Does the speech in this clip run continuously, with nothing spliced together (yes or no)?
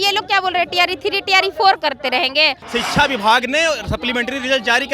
no